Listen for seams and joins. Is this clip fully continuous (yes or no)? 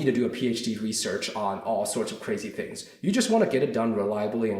yes